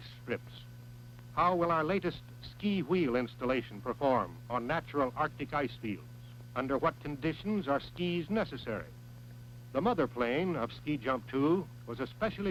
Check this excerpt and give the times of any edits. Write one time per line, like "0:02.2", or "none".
none